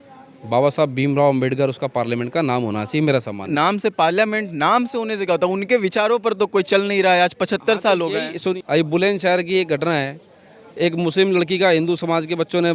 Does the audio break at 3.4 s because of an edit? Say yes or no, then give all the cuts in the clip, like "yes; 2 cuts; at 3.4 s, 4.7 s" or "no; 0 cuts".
yes; 2 cuts; at 3.4 s, 8.5 s